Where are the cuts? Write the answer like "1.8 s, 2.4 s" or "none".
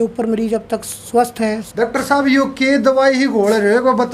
1.6 s